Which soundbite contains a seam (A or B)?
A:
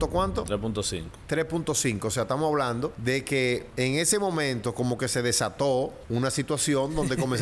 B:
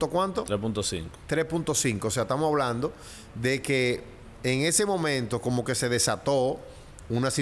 A